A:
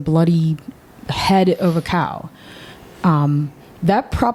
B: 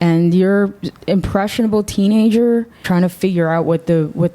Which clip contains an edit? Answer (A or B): B